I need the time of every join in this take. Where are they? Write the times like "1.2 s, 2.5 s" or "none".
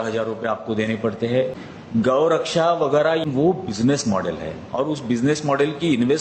1.7 s, 3.2 s